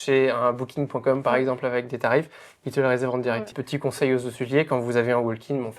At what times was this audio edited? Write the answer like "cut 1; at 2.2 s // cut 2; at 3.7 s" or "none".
cut 1; at 3.5 s